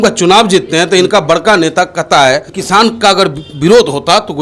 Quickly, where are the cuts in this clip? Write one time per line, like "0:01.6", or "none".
0:02.5